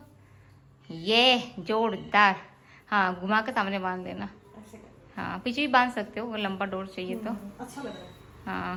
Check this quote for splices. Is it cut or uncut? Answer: uncut